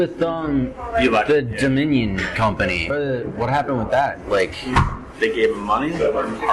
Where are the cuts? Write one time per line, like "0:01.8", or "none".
0:02.9